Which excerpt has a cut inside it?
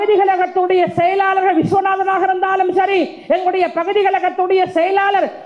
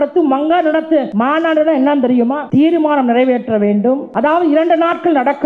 second; 3 cuts; at 1.1 s, 2.4 s, 4.1 s

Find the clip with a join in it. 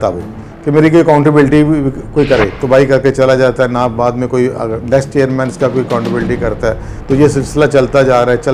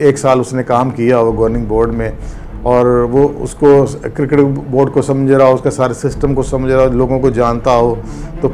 first; 1 cut; at 2.6 s

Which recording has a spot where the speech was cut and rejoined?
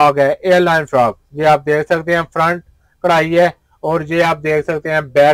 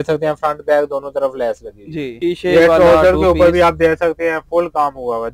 second; 1 cut; at 2.1 s

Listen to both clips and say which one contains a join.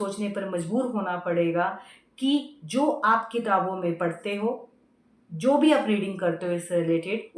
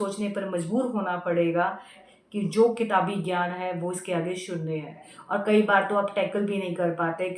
second; 2 cuts; at 2.1 s, 5.1 s

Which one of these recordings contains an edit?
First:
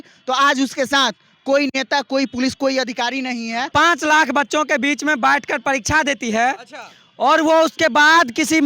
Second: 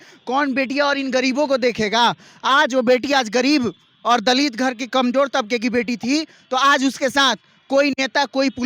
first; 1 cut; at 3.7 s

